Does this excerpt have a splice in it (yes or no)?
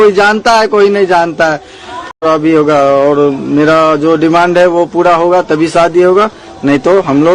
yes